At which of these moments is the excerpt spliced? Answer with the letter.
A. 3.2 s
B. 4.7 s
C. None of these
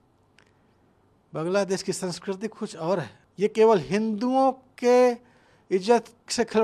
A